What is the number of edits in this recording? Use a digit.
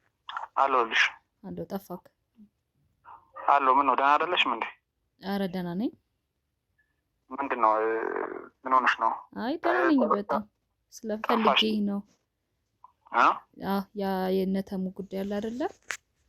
0